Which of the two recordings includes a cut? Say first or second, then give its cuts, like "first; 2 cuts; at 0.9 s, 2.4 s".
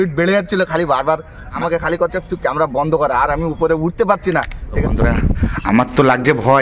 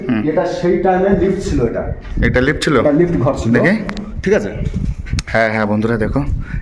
first; 2 cuts; at 1.6 s, 4.8 s